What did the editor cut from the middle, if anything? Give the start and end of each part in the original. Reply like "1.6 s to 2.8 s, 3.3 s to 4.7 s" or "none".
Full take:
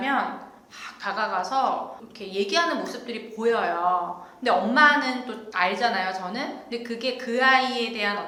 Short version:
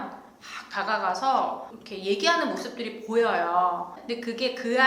4.3 s to 6.6 s

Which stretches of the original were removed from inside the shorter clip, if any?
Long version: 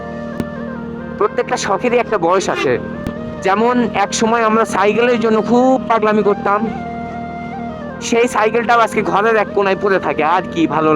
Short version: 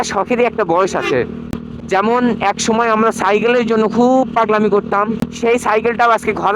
6.8 s to 7.9 s

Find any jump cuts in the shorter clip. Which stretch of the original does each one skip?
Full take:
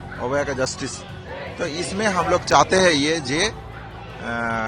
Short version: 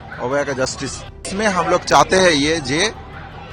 1.3 s to 1.9 s

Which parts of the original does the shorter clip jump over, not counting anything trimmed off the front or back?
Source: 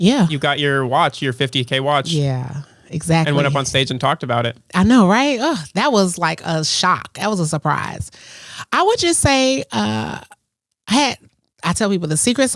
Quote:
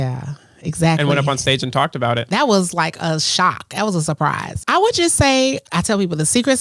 4.5 s to 5.7 s, 8.0 s to 8.6 s, 9.7 s to 11.5 s

